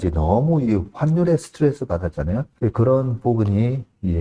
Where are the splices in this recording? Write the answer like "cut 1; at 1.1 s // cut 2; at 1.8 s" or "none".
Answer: cut 1; at 2.5 s